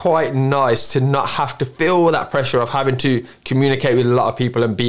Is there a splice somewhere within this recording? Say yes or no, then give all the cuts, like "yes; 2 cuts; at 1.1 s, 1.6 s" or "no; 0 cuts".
no; 0 cuts